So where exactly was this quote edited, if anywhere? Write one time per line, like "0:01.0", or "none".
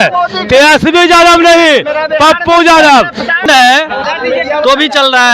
0:03.4